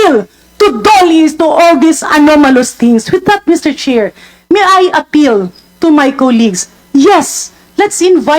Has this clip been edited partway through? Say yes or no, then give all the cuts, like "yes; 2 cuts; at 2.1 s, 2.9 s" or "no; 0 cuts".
no; 0 cuts